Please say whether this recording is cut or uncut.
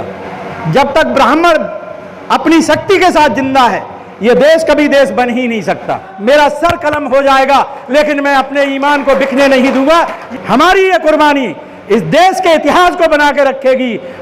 cut